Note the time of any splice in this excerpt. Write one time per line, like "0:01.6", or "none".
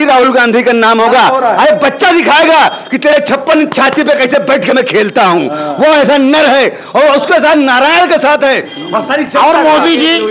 none